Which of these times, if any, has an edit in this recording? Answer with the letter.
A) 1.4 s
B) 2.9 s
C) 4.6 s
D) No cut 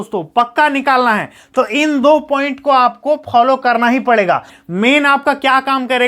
C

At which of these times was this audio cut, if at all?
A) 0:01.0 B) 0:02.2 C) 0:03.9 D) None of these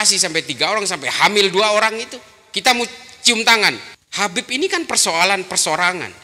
C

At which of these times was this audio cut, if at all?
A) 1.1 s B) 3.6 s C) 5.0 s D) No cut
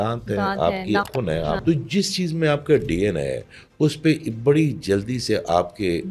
A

